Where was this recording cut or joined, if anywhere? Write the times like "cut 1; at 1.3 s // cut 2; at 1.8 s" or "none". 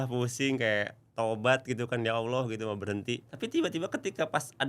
cut 1; at 3.3 s